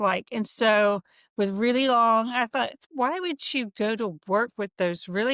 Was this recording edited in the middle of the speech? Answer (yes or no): yes